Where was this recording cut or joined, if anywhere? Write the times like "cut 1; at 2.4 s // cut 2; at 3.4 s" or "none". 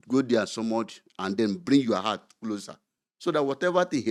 none

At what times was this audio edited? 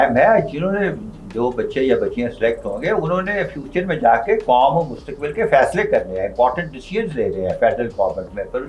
none

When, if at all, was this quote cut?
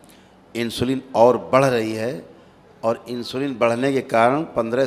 none

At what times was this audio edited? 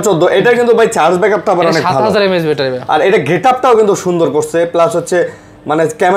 none

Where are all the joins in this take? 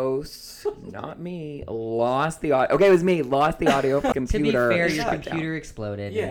cut 1; at 4.1 s

